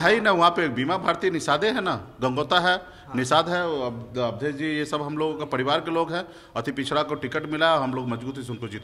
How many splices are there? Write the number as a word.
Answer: zero